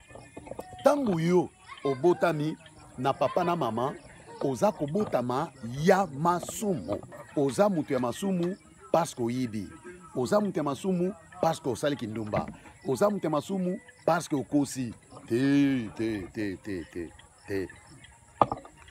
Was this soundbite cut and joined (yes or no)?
yes